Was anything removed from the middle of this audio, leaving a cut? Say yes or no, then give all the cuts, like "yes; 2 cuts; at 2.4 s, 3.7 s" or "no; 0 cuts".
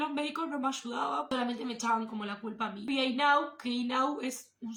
no; 0 cuts